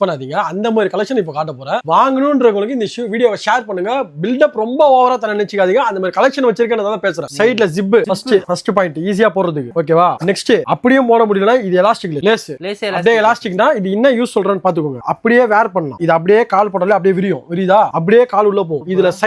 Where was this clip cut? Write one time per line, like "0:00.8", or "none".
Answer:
none